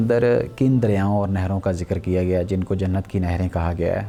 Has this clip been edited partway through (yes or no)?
no